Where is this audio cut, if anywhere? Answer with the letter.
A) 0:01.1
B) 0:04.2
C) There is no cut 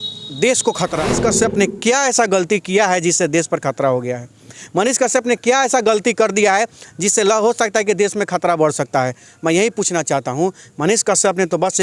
A